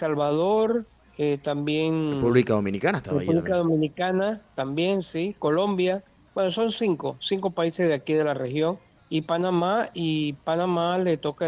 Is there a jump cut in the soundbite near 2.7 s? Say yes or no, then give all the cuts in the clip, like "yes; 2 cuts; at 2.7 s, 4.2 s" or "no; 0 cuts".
no; 3 cuts; at 1.0 s, 6.2 s, 8.9 s